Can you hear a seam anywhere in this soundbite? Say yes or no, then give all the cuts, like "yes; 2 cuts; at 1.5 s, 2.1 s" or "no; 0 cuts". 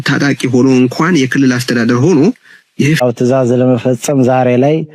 yes; 1 cut; at 3.0 s